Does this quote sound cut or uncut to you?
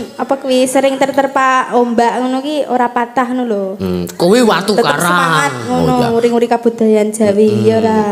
uncut